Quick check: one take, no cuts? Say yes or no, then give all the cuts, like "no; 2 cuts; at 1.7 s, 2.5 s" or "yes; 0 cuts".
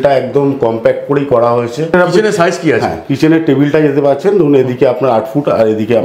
yes; 0 cuts